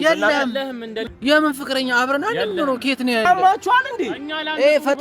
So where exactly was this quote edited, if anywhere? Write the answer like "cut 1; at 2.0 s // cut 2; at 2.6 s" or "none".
cut 1; at 3.2 s